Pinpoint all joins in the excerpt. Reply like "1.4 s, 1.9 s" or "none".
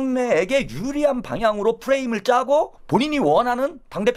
2.8 s